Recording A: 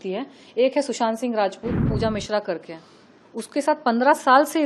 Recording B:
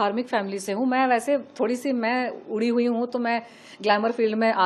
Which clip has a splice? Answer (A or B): A